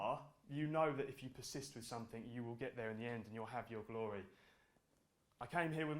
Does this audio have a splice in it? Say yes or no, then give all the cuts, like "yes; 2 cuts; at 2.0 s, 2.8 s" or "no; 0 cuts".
no; 0 cuts